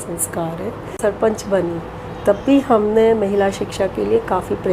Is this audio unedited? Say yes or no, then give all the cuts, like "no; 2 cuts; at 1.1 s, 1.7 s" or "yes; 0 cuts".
no; 1 cut; at 1.0 s